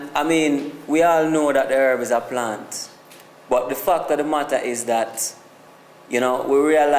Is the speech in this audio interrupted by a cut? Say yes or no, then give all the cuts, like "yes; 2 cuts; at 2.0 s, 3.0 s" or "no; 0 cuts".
yes; 1 cut; at 2.4 s